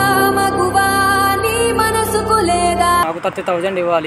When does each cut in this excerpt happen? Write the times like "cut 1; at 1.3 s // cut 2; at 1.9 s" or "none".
cut 1; at 3.1 s